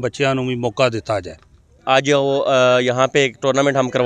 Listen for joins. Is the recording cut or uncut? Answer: uncut